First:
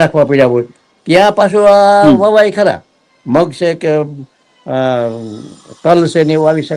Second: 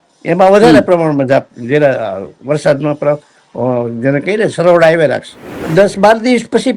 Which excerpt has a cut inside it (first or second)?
second